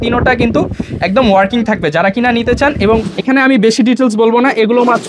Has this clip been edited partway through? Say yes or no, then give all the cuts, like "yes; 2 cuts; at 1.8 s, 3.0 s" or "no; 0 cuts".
yes; 1 cut; at 3.1 s